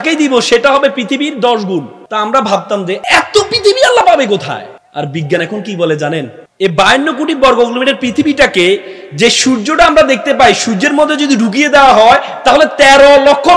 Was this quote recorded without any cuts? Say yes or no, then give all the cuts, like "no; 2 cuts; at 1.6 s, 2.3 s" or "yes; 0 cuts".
no; 4 cuts; at 2.0 s, 3.0 s, 4.8 s, 6.4 s